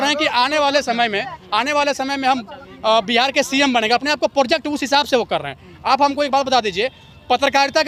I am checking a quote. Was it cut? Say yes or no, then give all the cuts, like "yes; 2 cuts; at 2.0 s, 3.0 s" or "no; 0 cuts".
no; 0 cuts